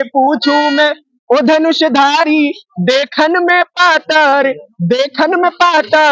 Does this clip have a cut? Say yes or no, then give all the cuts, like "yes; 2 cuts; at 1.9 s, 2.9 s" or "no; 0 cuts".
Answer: no; 0 cuts